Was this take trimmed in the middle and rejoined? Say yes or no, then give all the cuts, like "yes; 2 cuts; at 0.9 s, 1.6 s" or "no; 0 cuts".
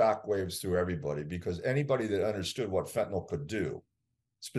no; 0 cuts